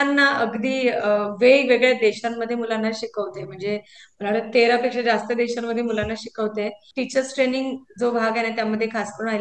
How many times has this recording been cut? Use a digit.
1